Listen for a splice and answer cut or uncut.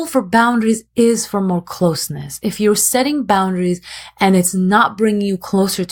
uncut